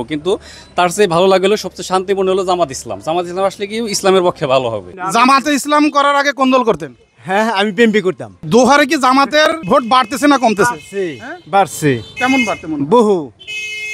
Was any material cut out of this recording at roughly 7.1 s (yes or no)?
no